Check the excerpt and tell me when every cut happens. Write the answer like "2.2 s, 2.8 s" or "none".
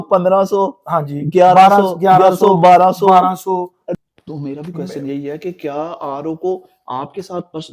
3.8 s